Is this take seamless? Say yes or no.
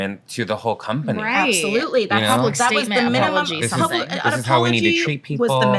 yes